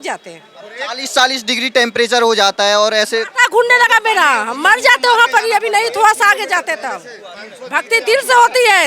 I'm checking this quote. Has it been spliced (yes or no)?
no